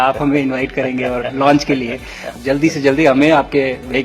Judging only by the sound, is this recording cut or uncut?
cut